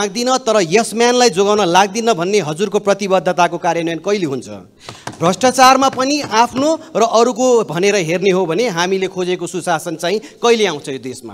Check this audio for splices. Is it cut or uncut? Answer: uncut